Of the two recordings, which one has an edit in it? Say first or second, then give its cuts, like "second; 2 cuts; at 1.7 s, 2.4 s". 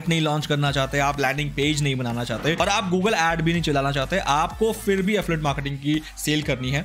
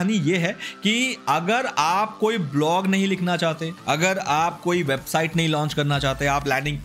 first; 1 cut; at 2.6 s